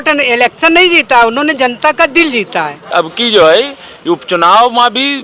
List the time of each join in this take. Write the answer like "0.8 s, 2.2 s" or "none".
2.8 s